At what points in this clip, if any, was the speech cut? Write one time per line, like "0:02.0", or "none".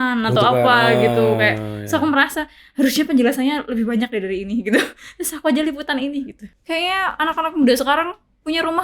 0:06.4